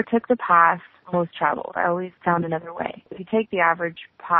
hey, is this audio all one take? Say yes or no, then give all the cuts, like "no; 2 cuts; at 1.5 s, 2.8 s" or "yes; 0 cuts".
no; 3 cuts; at 0.9 s, 2.1 s, 3.1 s